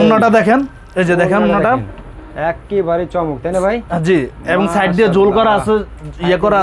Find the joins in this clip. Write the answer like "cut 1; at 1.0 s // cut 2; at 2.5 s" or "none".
none